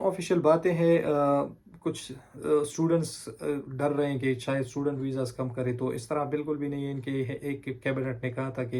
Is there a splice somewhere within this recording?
no; 0 cuts

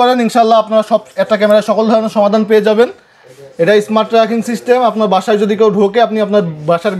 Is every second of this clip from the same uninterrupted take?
yes; 0 cuts

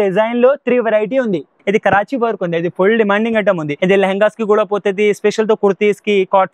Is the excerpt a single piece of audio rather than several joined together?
no; 2 cuts; at 1.5 s, 3.7 s

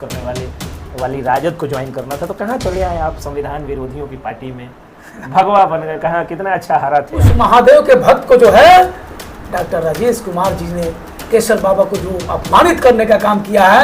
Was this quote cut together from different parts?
yes; 1 cut; at 7.3 s

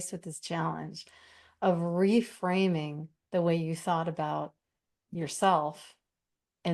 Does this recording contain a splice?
no; 0 cuts

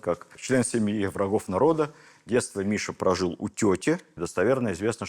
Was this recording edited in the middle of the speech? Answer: yes; 1 cut; at 4.2 s

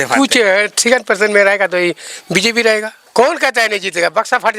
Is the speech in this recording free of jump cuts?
no; 1 cut; at 3.0 s

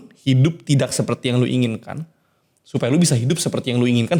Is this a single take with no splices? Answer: yes; 0 cuts

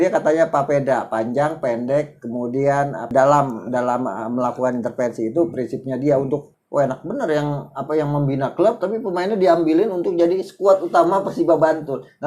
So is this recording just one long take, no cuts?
no; 2 cuts; at 3.1 s, 6.5 s

